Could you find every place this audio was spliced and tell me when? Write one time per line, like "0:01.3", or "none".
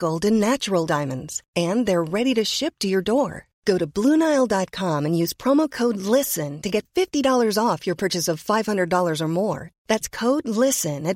none